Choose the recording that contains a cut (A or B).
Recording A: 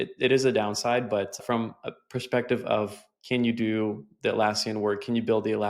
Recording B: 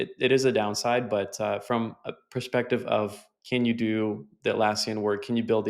A